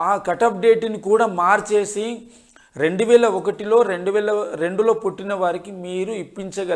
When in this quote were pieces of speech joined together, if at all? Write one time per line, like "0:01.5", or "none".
none